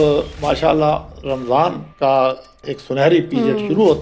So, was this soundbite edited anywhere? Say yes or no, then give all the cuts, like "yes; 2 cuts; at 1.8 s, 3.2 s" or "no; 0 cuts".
yes; 2 cuts; at 1.9 s, 2.7 s